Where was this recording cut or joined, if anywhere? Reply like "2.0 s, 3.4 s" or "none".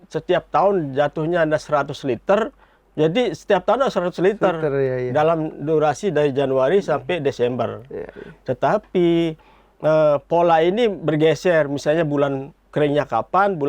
none

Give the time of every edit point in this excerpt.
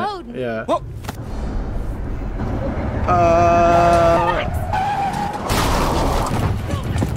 4.2 s

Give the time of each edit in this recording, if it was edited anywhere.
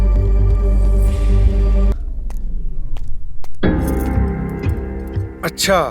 1.9 s

